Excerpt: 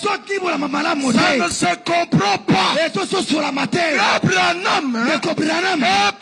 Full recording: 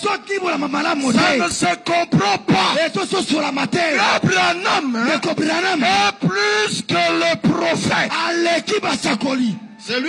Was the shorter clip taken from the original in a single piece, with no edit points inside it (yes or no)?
yes